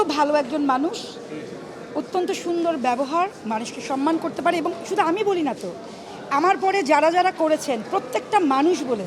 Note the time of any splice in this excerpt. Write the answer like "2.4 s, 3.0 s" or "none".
none

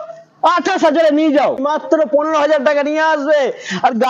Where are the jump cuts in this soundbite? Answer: 1.6 s

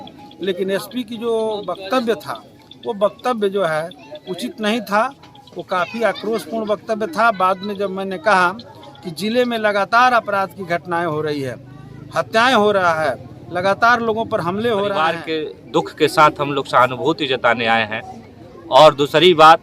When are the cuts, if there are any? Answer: 15.3 s

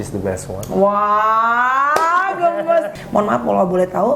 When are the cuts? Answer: 3.0 s

